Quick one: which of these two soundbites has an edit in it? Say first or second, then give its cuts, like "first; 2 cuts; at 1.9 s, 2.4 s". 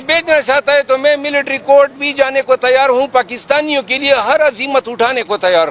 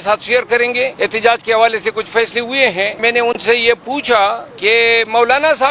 second; 3 cuts; at 0.9 s, 3.0 s, 4.5 s